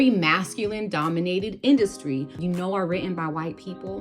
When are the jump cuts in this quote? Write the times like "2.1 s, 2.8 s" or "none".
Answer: 2.4 s